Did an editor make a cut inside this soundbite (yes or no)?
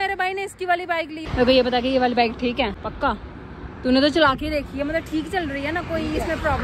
yes